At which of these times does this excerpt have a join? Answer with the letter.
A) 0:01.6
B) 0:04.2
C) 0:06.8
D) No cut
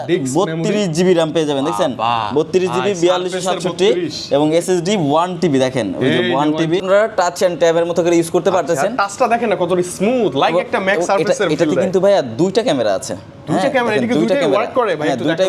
C